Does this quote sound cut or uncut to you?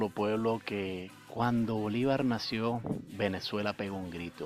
cut